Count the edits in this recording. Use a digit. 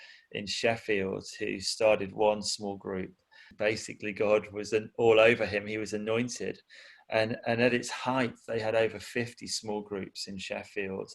1